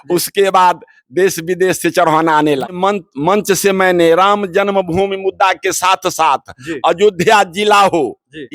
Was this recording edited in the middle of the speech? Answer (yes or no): yes